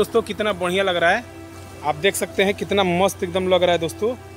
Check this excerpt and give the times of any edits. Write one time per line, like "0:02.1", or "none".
none

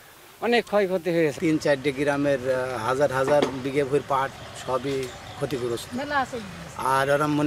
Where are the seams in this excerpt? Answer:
none

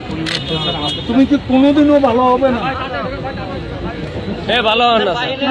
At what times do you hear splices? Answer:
none

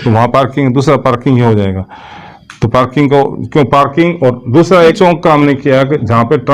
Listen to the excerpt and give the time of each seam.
0:05.0

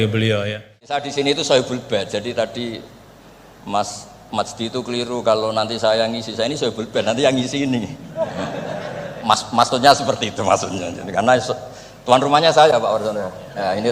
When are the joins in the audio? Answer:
0:01.0

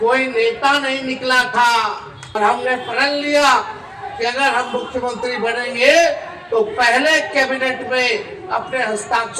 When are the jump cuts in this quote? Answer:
0:02.4

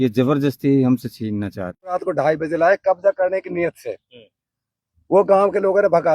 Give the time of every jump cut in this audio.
0:01.9

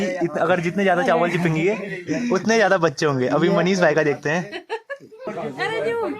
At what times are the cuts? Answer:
0:05.3

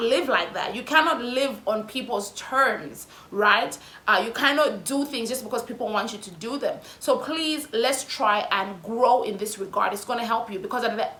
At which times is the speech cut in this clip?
none

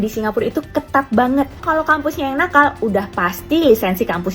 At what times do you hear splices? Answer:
0:01.6

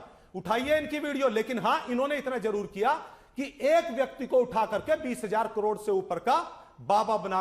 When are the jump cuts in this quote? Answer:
none

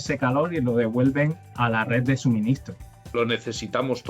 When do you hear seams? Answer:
0:01.4
0:03.2

